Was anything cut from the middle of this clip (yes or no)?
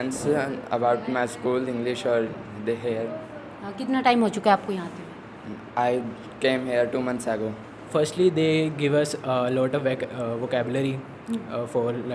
yes